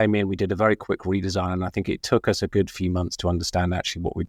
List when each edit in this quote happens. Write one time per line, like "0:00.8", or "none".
none